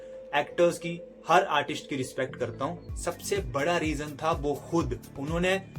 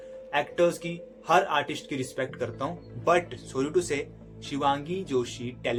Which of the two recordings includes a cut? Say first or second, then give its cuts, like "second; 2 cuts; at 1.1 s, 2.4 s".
first; 1 cut; at 2.9 s